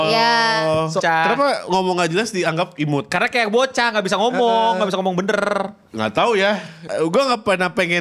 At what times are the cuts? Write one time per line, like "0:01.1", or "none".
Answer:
0:01.0
0:05.8
0:06.8